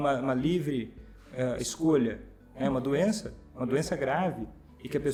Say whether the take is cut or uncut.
uncut